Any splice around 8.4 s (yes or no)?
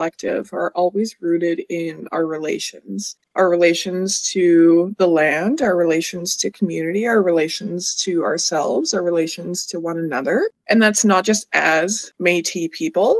no